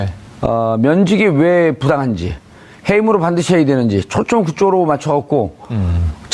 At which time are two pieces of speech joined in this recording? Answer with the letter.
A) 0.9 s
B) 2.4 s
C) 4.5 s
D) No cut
C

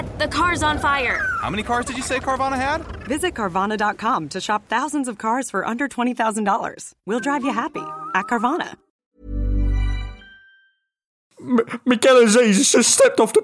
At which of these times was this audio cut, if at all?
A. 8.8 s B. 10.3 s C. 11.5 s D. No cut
C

